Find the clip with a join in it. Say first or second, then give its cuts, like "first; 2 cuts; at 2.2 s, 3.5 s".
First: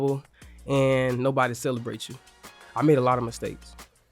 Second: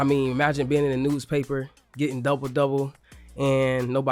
first; 1 cut; at 2.6 s